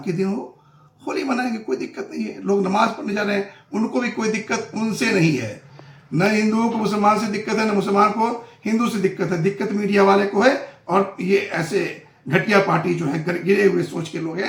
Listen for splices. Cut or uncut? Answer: uncut